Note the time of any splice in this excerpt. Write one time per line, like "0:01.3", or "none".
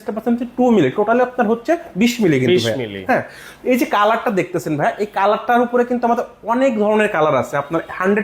none